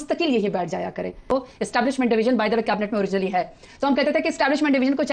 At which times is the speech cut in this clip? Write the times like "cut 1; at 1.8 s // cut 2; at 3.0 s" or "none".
cut 1; at 1.3 s